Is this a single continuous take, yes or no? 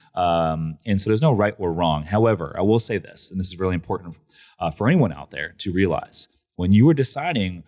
yes